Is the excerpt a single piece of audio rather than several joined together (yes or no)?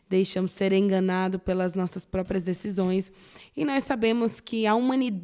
yes